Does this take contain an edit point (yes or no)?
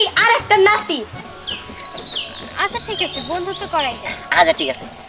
yes